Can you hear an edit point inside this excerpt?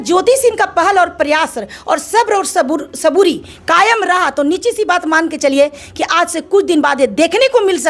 no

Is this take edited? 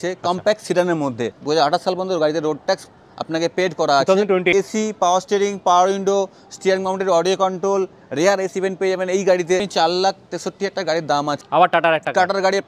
yes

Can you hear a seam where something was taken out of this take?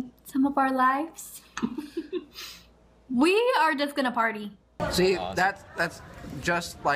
yes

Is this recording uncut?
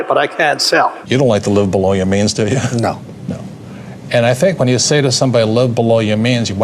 no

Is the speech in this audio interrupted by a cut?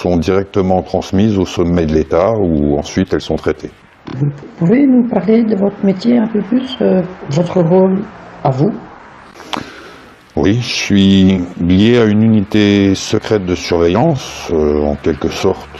yes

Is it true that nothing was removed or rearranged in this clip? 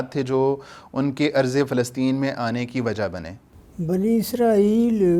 yes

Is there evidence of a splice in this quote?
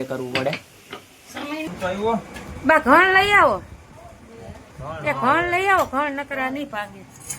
yes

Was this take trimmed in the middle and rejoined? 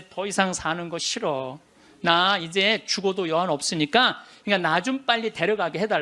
yes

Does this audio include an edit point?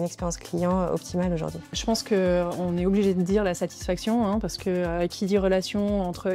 yes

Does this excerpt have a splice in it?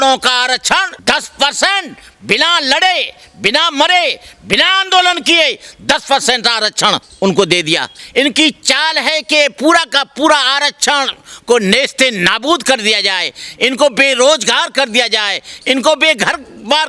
yes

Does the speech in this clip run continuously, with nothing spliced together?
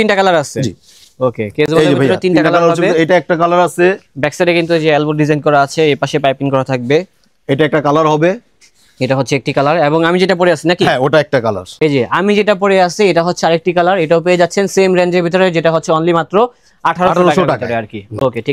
yes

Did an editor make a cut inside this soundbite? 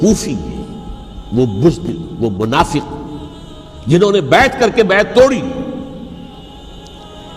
yes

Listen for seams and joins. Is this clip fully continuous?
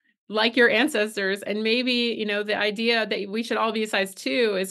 yes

